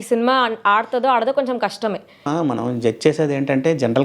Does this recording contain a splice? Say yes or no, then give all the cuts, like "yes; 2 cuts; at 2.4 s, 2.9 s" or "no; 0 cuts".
yes; 1 cut; at 2.3 s